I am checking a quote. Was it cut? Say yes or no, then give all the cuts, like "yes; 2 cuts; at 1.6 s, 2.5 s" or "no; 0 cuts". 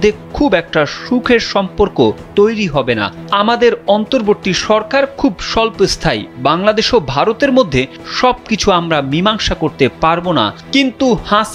no; 0 cuts